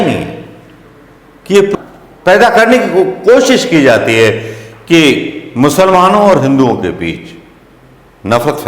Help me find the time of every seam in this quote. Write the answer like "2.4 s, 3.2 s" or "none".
1.7 s